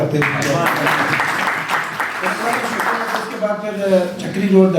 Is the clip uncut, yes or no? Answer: yes